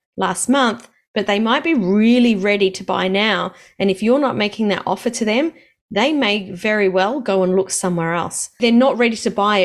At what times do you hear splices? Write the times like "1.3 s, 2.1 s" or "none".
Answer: 8.6 s